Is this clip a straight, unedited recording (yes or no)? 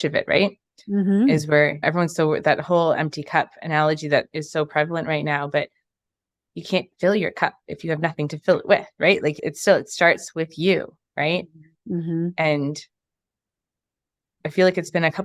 yes